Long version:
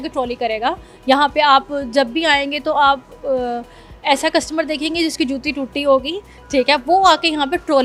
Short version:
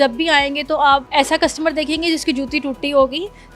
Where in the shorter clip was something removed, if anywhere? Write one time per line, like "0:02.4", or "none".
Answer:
0:01.1